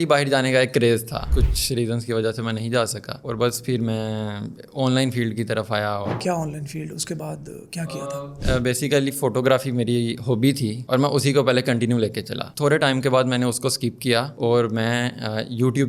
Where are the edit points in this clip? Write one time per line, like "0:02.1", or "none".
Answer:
0:01.3
0:06.1